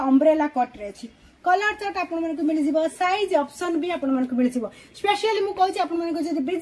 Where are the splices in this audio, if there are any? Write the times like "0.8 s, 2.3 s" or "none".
none

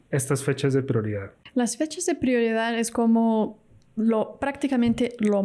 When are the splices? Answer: 1.4 s

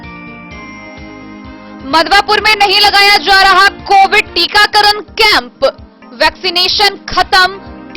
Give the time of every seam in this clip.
none

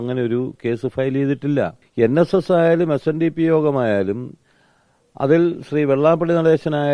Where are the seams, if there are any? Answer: 1.8 s

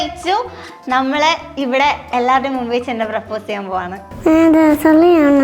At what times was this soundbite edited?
4.0 s

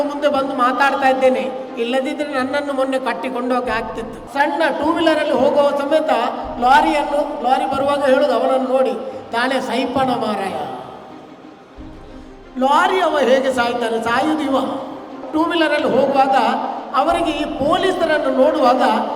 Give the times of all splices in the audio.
4.2 s, 15.2 s

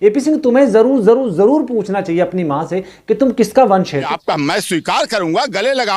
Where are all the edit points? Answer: 4.1 s

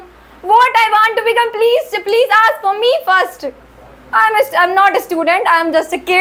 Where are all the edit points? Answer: none

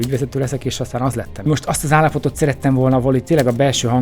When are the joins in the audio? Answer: 1.5 s

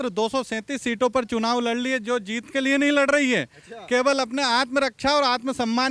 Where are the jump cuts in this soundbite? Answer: none

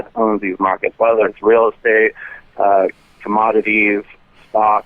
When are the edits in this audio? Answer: none

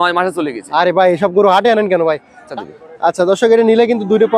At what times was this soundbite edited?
2.5 s

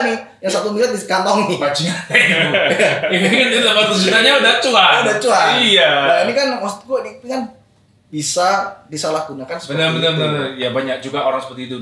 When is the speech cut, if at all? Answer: none

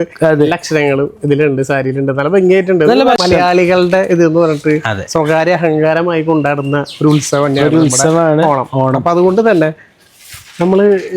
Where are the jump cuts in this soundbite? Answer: 3.2 s

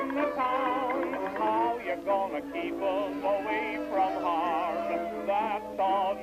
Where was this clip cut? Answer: 3.9 s

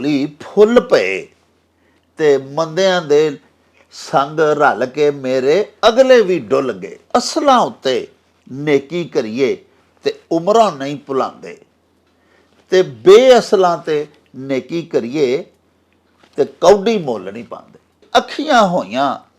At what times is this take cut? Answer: 6.9 s, 18.0 s

